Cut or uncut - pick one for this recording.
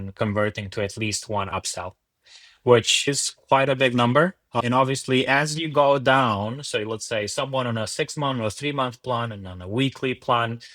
cut